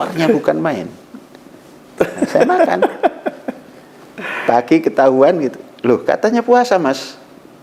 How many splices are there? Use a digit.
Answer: 0